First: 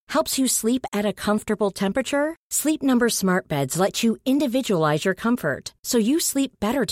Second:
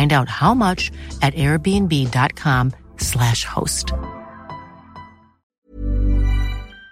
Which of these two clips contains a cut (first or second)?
second